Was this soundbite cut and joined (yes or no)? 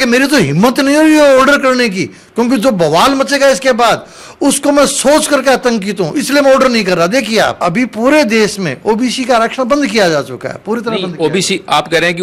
yes